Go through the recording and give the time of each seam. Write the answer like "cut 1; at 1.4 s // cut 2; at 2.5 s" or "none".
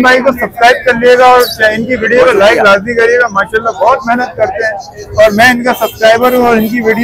none